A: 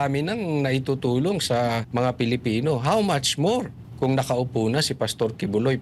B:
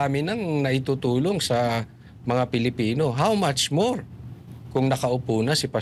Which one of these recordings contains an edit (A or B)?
A